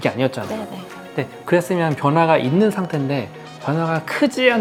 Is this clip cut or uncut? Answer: uncut